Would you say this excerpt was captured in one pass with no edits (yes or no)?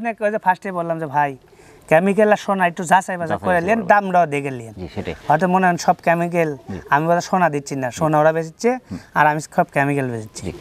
yes